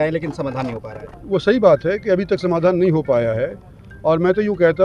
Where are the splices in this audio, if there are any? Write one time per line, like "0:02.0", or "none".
none